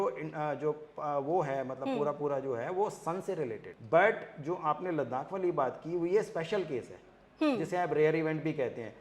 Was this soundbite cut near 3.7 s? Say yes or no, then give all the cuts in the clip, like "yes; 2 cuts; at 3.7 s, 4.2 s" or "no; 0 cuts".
yes; 1 cut; at 3.7 s